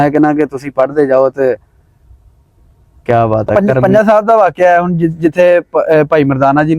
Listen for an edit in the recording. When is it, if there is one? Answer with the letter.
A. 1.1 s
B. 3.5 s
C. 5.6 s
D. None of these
B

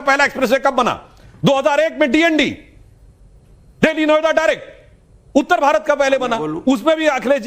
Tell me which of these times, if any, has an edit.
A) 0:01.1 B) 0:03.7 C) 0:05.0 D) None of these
A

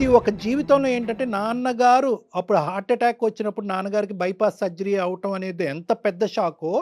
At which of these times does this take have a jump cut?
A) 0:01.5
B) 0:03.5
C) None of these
C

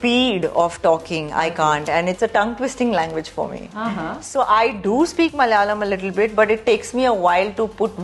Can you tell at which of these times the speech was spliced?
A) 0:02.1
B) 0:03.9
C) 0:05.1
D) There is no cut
D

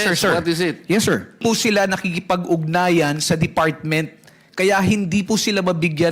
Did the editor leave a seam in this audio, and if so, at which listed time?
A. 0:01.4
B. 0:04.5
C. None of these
A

